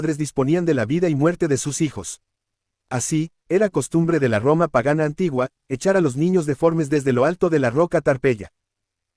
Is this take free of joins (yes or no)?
yes